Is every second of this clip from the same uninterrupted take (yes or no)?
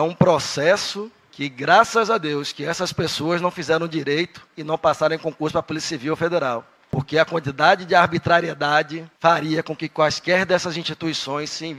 yes